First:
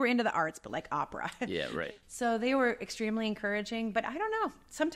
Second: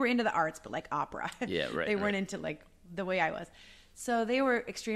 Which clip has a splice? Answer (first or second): first